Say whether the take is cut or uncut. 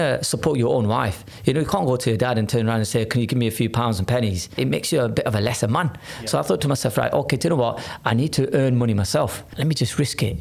cut